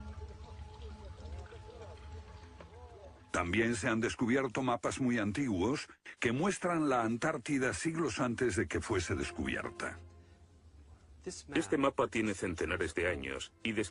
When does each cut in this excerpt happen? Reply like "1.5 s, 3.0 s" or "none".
none